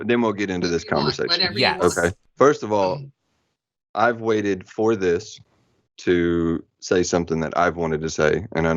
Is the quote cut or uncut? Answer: cut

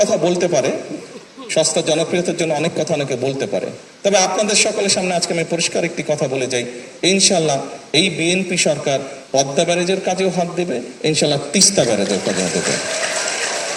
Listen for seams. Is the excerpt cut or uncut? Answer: uncut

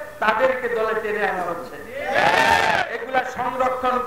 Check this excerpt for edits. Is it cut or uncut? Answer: uncut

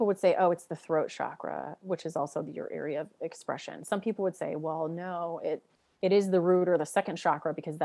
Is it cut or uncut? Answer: uncut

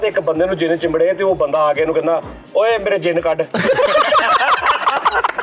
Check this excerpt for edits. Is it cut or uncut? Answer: uncut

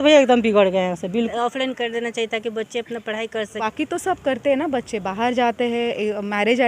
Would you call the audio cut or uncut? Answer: cut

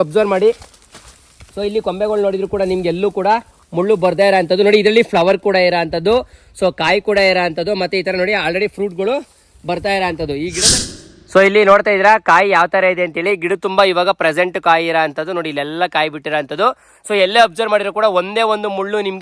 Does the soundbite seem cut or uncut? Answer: cut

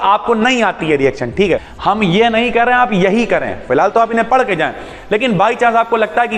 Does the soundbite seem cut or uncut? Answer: cut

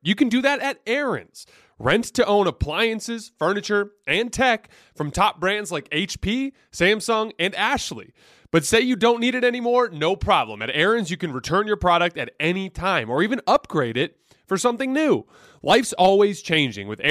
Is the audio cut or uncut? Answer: uncut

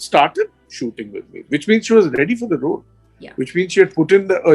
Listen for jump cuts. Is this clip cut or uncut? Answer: uncut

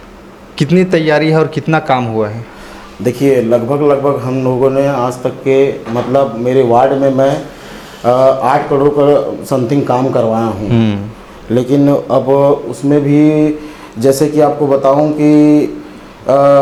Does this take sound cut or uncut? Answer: uncut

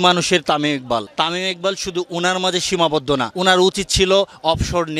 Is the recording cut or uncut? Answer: cut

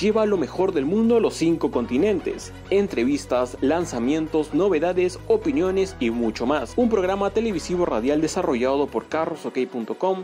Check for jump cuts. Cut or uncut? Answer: uncut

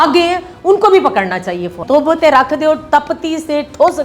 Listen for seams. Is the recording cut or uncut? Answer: cut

